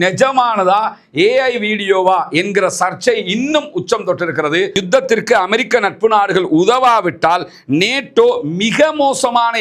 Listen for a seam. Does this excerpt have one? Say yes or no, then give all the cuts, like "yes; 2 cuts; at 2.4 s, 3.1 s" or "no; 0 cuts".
yes; 1 cut; at 4.8 s